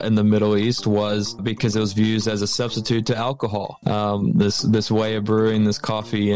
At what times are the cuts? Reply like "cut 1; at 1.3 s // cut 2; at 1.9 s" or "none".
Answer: cut 1; at 1.4 s // cut 2; at 3.8 s

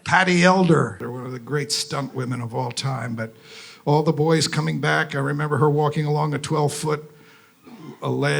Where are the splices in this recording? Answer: cut 1; at 1.1 s

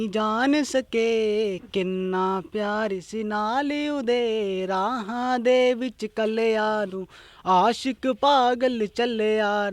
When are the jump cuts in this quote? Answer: none

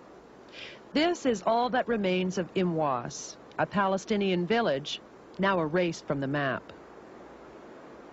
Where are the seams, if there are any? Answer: cut 1; at 2.7 s

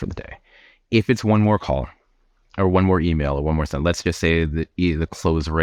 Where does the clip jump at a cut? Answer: none

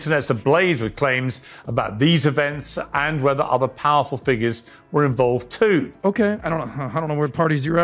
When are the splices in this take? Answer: none

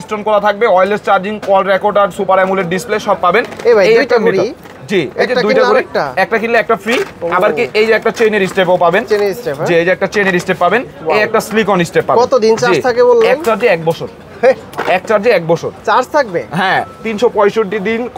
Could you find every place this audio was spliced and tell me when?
none

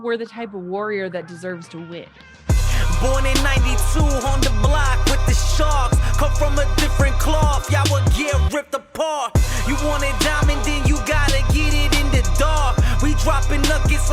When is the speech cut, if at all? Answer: cut 1; at 2.3 s

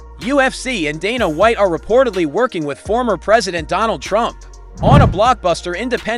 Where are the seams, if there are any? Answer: none

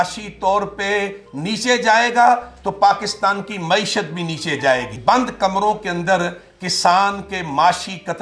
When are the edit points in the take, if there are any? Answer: cut 1; at 4.9 s

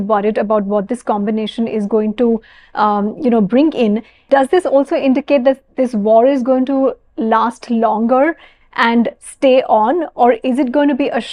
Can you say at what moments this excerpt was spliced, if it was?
none

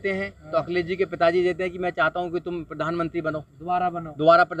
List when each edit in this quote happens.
none

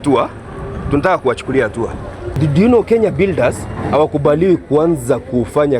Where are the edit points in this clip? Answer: cut 1; at 2.3 s

